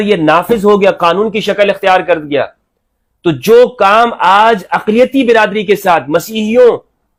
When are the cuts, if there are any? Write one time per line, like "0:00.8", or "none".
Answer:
none